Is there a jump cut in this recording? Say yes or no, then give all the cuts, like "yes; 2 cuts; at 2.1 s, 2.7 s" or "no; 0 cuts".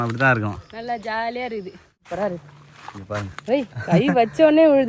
yes; 1 cut; at 2.0 s